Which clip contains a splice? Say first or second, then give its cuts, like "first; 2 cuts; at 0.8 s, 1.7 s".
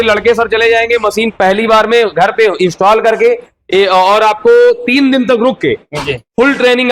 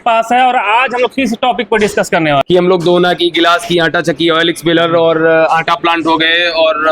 second; 1 cut; at 2.4 s